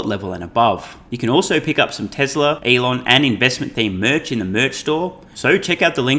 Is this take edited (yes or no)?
yes